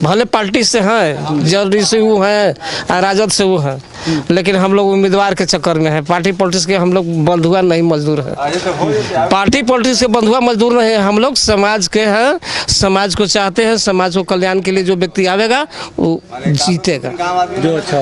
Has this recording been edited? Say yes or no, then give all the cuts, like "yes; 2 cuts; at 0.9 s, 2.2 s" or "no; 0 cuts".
no; 0 cuts